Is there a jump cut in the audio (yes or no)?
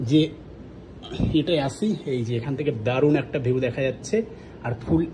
no